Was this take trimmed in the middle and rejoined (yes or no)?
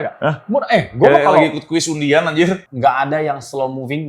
yes